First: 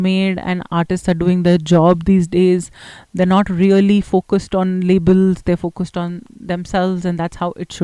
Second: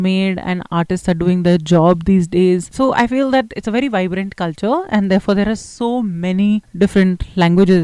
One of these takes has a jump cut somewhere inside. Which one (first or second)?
second